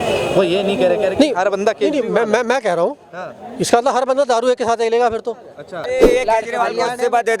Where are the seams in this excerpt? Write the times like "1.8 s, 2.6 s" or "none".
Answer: 5.9 s